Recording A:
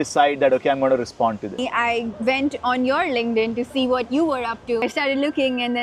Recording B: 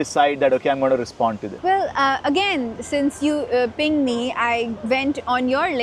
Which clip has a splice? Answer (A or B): A